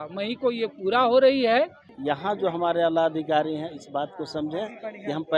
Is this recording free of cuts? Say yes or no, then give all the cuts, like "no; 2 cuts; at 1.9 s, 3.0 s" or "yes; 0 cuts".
no; 1 cut; at 1.9 s